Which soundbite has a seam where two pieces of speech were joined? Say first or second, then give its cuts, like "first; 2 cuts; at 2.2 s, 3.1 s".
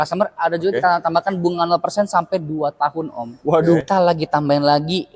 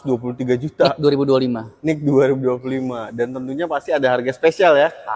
first; 1 cut; at 3.8 s